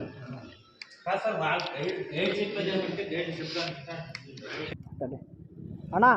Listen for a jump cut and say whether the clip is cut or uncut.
cut